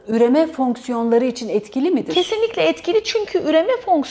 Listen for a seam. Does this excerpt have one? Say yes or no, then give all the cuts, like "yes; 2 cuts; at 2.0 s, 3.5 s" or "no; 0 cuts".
no; 0 cuts